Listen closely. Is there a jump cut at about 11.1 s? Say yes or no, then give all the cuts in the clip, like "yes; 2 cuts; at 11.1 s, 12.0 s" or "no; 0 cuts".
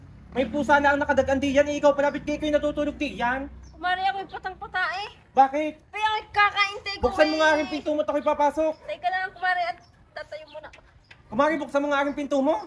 yes; 1 cut; at 11.1 s